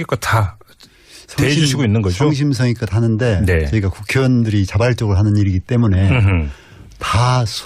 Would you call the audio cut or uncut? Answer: cut